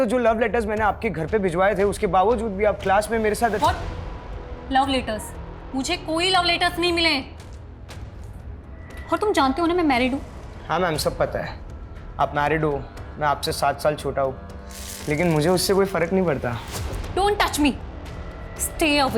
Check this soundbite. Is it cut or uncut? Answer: uncut